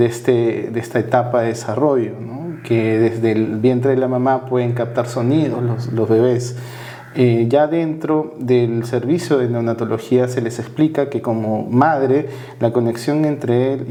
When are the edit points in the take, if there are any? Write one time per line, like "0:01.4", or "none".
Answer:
none